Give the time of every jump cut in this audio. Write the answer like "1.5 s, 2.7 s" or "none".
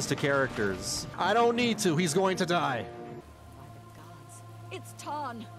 1.0 s, 3.2 s